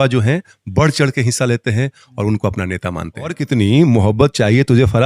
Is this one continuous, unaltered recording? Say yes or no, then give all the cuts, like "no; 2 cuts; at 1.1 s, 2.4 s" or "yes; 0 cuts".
no; 1 cut; at 3.4 s